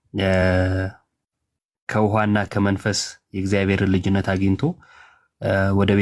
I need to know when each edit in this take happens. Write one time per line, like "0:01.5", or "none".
none